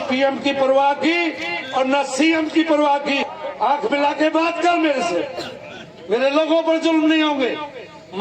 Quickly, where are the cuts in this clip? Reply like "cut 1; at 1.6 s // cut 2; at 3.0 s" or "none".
cut 1; at 3.3 s